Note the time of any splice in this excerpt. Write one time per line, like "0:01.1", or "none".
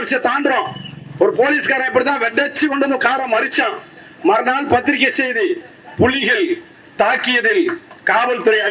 none